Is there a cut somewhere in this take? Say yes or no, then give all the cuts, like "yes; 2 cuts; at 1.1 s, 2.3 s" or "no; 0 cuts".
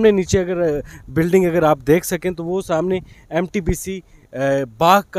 no; 0 cuts